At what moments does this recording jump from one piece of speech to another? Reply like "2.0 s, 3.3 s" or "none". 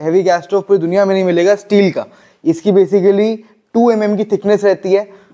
none